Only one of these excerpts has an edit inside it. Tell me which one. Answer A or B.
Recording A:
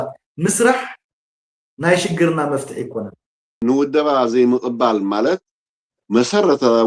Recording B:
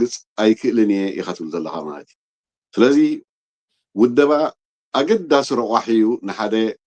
A